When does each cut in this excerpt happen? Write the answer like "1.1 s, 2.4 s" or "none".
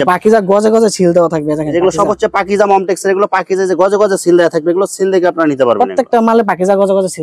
none